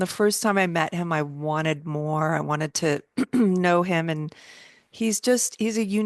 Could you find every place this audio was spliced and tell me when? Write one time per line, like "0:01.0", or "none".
none